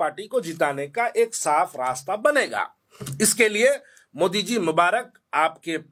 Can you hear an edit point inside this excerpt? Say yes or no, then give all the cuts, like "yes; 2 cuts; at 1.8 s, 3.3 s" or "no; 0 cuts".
no; 0 cuts